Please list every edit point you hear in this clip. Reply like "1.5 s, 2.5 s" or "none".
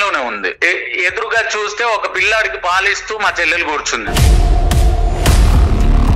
4.0 s